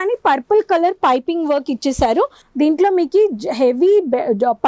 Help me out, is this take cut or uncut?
cut